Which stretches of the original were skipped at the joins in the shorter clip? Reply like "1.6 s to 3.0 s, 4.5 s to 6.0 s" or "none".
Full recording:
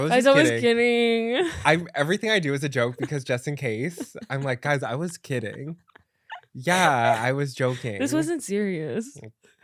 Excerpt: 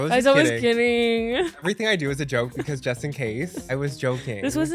1.6 s to 2.1 s, 4.1 s to 7.2 s